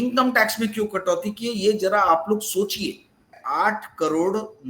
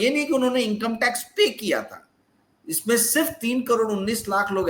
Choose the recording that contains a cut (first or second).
first